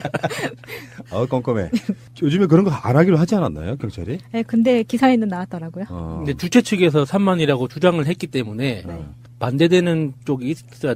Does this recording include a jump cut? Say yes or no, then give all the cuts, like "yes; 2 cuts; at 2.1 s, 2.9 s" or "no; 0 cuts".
no; 0 cuts